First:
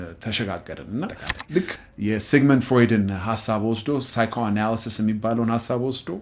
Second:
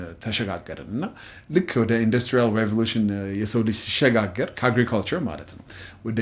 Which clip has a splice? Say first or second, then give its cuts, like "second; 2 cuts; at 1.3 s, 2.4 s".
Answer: first; 1 cut; at 1.7 s